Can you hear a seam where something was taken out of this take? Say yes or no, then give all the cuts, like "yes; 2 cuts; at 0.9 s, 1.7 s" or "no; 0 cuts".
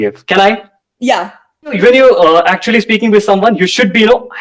yes; 1 cut; at 1.8 s